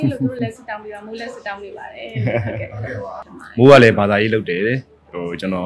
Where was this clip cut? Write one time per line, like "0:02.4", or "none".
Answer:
0:03.2